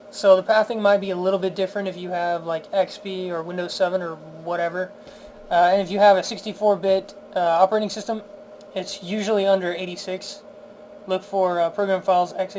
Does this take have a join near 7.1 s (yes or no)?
no